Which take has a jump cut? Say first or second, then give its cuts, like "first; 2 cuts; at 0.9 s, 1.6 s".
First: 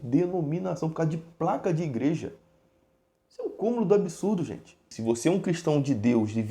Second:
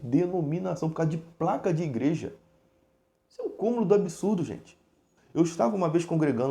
first; 1 cut; at 4.9 s